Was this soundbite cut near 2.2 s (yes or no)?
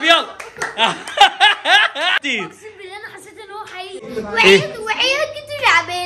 yes